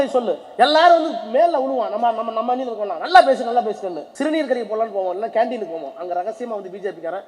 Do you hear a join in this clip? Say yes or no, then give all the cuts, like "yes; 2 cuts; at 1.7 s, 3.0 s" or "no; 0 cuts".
yes; 1 cut; at 4.0 s